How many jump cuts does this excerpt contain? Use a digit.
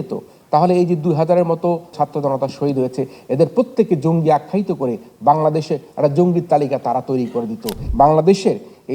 2